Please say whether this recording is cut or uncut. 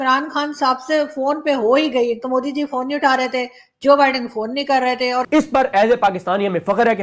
cut